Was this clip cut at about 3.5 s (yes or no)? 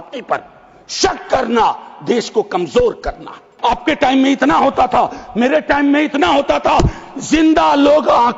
yes